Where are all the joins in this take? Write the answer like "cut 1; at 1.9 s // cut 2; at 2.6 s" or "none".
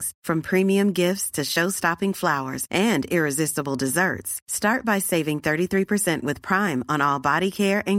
none